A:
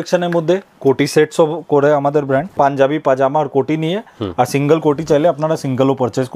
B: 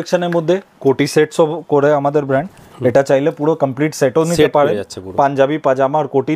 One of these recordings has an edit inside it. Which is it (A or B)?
A